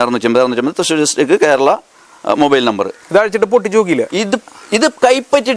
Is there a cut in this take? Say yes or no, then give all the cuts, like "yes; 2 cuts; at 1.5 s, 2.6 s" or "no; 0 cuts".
no; 0 cuts